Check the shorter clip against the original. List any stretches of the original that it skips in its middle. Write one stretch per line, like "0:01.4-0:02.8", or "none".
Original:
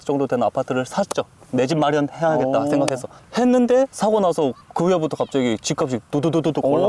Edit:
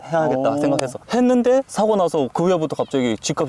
0:03.1-0:03.2
0:04.6-0:04.7